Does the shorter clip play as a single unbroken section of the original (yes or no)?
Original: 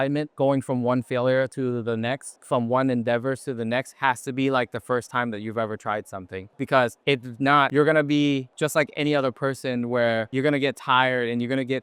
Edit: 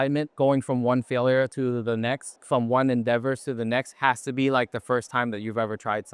yes